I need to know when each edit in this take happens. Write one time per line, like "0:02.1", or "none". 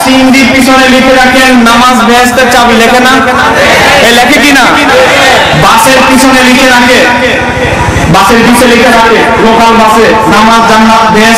none

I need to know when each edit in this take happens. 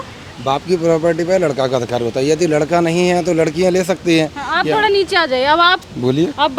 none

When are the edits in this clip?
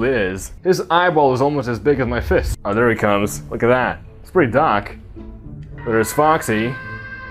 0:02.6

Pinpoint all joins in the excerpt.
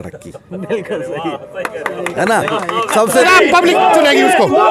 0:03.2

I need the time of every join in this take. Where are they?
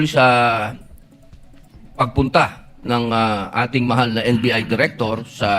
none

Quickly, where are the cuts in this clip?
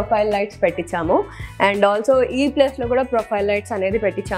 none

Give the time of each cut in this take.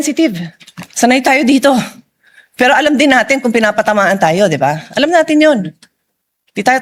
none

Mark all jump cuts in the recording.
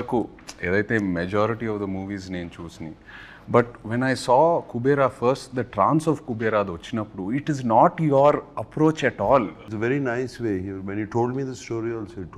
0:09.6

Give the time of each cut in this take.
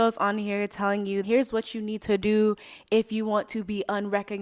0:01.2

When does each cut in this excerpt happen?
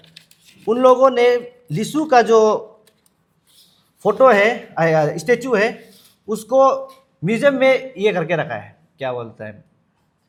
none

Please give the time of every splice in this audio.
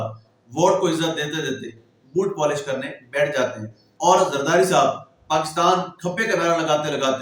none

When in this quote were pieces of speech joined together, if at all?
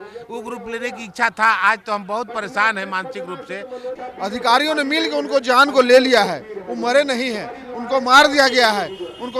0:04.0

